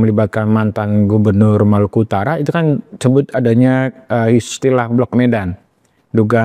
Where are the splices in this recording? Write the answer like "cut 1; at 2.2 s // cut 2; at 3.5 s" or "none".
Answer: none